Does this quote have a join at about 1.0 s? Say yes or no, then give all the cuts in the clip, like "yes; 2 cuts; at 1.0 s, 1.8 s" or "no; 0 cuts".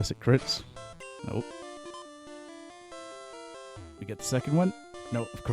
yes; 1 cut; at 1.0 s